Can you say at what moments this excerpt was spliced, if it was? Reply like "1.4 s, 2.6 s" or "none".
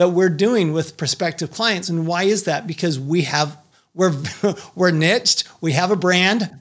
none